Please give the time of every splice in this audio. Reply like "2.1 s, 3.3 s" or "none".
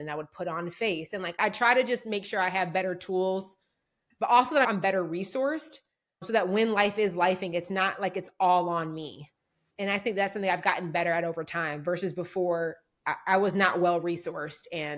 1.3 s